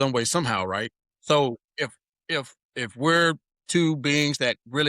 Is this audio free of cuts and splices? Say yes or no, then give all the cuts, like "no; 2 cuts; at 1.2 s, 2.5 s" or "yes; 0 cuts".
no; 3 cuts; at 1.1 s, 2.6 s, 3.5 s